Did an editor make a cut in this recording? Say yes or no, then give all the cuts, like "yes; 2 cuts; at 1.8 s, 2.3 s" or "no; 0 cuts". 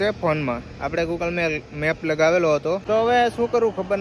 yes; 1 cut; at 2.8 s